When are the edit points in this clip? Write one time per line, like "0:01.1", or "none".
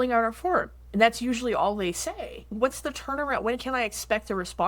0:02.5